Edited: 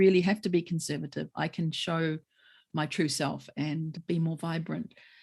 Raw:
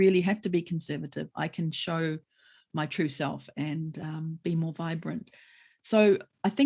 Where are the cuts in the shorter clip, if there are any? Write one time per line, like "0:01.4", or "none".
0:04.0